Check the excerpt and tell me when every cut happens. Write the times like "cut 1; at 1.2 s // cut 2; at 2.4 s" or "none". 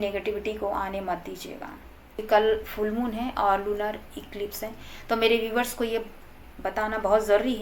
cut 1; at 2.2 s